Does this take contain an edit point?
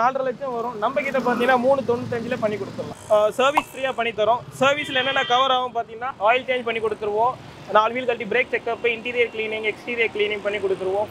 yes; 2 cuts; at 2.8 s, 6.0 s

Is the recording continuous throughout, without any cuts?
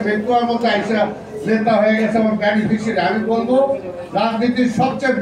yes; 0 cuts

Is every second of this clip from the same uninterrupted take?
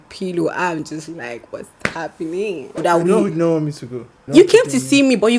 no; 2 cuts; at 2.8 s, 4.2 s

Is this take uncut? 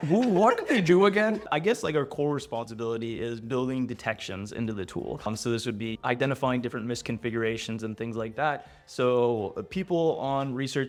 yes; 0 cuts

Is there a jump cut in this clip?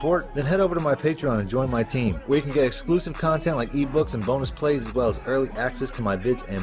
no; 0 cuts

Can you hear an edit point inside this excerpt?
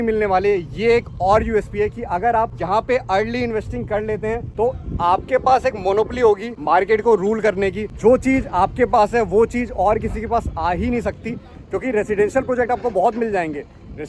yes; 4 cuts; at 2.6 s, 4.5 s, 6.5 s, 7.9 s

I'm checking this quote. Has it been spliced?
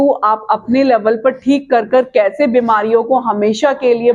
no; 0 cuts

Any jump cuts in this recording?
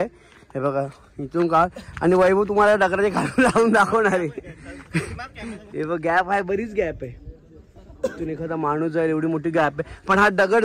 no; 0 cuts

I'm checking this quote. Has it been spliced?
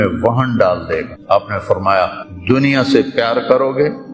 yes; 2 cuts; at 1.1 s, 2.2 s

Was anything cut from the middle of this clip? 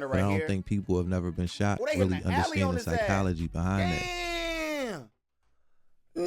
no; 0 cuts

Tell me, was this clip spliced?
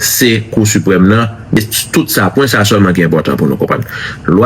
yes; 1 cut; at 1.6 s

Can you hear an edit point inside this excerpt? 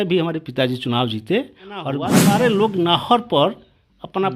yes; 1 cut; at 2.1 s

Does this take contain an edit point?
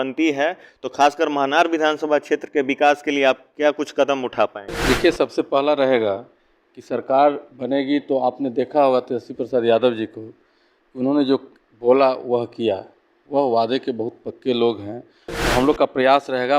yes; 1 cut; at 4.7 s

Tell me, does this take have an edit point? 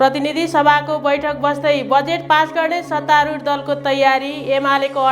no; 0 cuts

